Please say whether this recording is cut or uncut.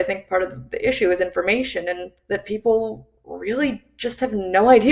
cut